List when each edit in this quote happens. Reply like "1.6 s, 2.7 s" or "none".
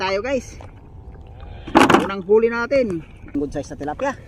3.3 s